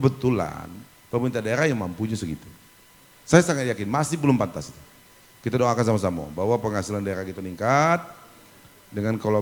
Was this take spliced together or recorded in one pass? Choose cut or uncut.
uncut